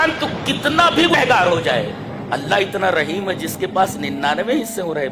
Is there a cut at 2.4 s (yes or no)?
no